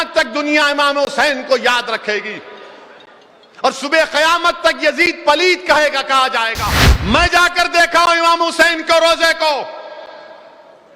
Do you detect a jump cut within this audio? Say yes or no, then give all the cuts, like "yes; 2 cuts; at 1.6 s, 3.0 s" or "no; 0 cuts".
yes; 1 cut; at 6.9 s